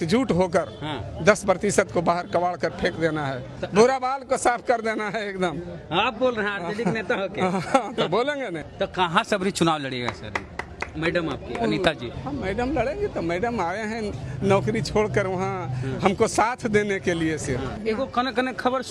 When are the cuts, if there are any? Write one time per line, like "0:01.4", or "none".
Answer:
0:08.6
0:12.1
0:17.8